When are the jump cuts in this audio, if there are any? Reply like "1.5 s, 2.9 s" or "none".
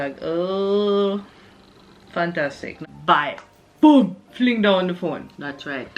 2.7 s